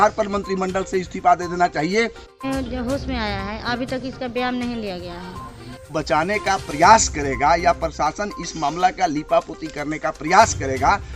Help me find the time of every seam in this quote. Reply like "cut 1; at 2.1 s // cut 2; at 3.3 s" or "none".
cut 1; at 2.3 s // cut 2; at 5.9 s